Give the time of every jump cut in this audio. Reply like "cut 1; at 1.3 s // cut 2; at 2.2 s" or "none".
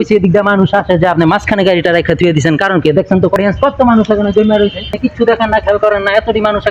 cut 1; at 3.4 s // cut 2; at 4.9 s